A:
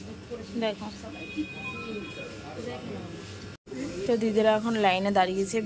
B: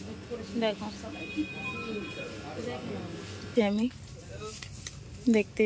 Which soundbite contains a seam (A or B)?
B